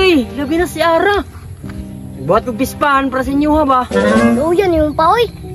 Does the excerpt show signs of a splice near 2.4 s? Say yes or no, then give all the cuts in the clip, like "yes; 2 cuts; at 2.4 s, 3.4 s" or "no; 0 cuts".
no; 1 cut; at 4.3 s